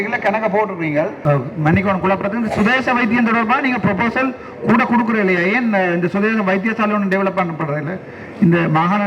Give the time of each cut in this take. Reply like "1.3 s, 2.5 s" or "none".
1.2 s